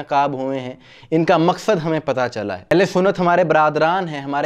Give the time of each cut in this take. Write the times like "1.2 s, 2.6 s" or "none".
2.7 s